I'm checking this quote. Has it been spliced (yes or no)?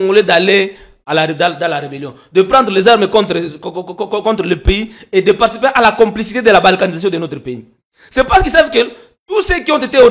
no